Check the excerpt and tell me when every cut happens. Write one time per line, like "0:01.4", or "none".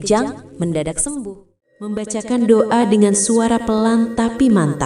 0:02.0